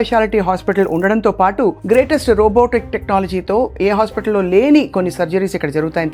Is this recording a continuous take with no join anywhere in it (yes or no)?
yes